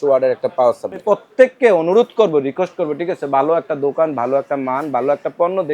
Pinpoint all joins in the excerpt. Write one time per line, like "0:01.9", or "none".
0:01.0